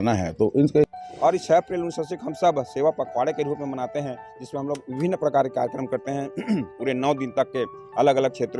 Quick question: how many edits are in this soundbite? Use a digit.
1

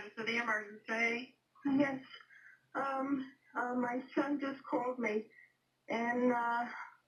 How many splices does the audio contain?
0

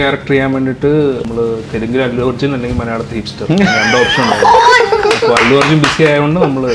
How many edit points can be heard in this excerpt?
1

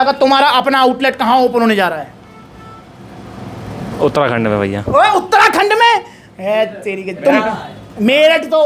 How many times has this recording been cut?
0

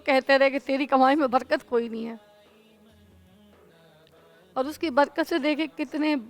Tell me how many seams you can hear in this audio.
0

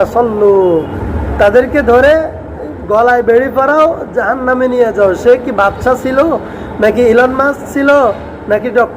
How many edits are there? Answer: 1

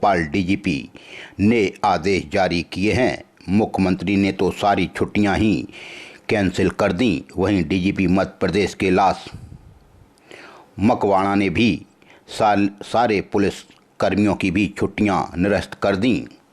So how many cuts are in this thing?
0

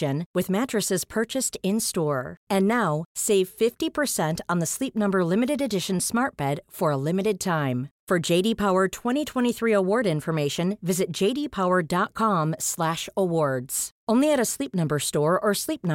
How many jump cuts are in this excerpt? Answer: 0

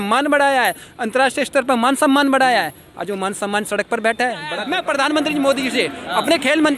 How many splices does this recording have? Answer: 1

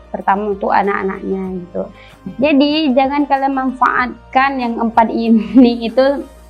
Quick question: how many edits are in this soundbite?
1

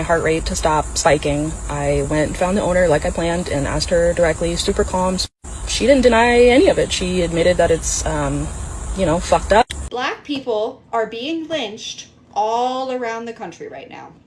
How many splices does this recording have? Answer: 1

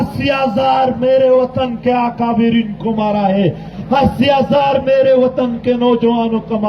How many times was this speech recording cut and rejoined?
1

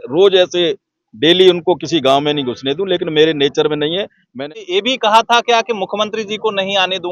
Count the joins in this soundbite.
1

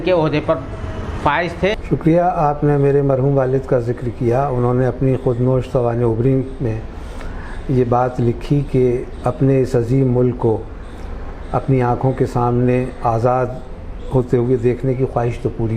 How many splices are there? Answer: 1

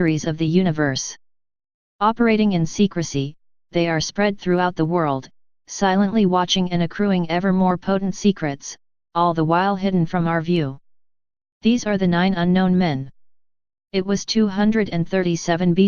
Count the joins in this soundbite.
0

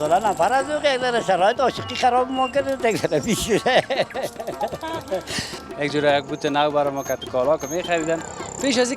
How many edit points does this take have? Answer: 1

